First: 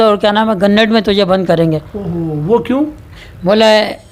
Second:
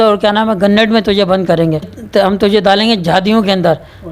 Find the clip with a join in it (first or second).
second